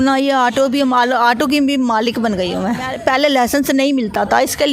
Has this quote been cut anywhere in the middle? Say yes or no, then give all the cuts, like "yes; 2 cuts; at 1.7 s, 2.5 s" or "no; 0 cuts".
yes; 1 cut; at 2.9 s